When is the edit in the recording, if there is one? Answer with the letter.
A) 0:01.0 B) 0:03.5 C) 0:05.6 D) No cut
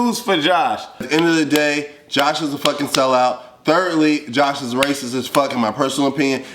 A